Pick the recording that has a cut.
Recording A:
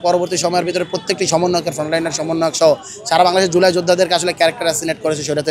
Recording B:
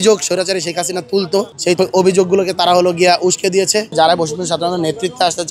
B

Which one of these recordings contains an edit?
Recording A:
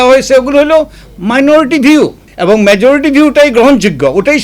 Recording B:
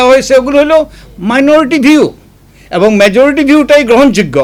A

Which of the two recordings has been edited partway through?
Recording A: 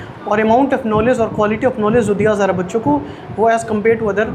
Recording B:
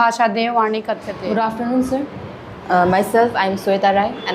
B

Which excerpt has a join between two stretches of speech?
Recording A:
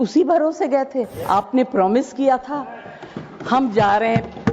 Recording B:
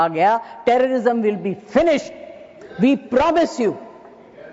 A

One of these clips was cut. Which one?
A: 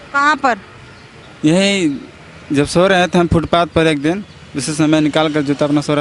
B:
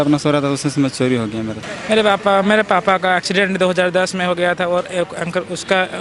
B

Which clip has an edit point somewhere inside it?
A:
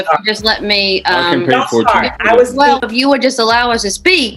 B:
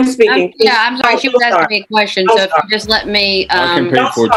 A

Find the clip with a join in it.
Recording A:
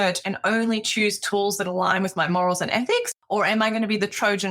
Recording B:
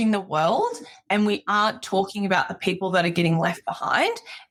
A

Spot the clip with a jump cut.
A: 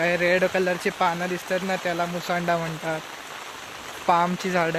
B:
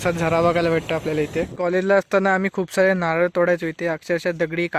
B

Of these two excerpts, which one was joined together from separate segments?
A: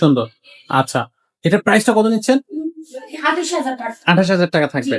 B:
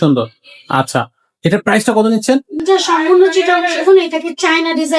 B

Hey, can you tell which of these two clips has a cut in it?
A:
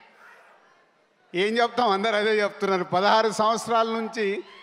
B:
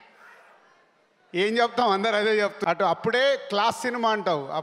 B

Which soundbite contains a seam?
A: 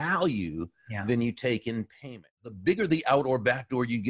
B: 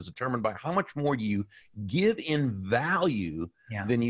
A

